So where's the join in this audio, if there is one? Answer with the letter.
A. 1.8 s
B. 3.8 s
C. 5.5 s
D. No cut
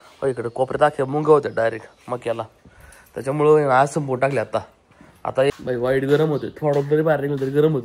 C